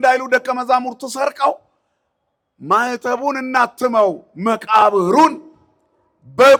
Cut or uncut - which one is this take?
uncut